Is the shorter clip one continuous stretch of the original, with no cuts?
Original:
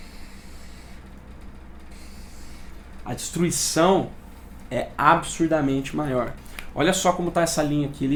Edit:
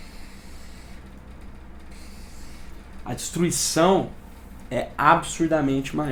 yes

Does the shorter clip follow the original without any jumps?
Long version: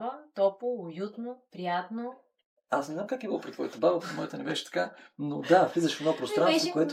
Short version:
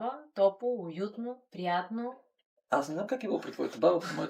yes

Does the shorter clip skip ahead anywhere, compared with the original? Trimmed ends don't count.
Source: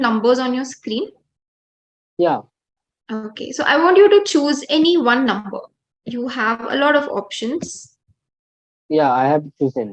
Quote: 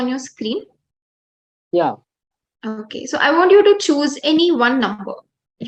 no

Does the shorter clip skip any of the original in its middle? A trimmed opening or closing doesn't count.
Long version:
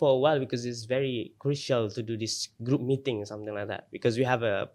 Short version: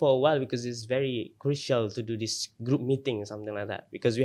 no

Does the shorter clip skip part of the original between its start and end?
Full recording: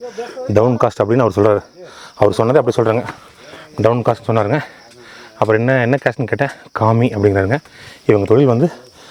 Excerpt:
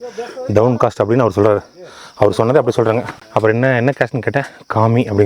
yes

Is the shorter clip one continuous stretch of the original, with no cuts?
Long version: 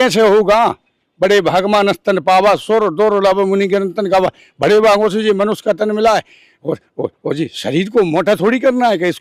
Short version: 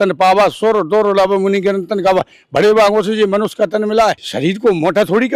no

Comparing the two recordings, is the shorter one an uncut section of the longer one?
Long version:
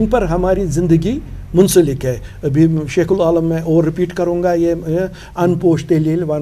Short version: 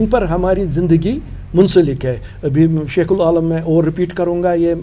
yes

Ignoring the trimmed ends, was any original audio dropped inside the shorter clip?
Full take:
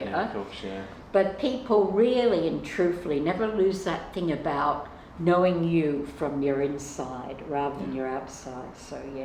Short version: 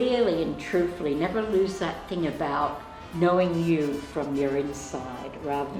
no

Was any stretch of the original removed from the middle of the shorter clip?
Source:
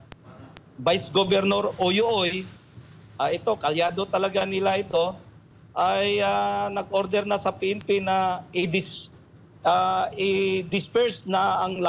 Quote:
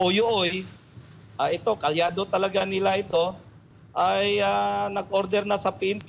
no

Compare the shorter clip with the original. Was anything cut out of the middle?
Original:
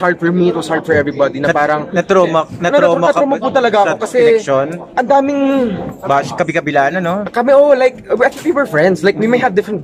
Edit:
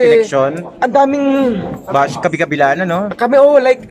no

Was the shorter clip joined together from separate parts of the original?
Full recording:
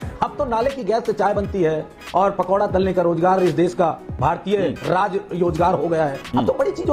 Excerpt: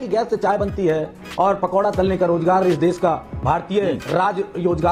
no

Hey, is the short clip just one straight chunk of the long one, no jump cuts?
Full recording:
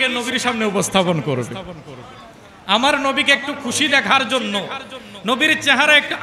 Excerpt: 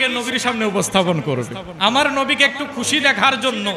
no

